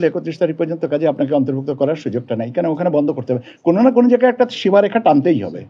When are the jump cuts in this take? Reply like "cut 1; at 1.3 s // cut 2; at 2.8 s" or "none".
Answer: none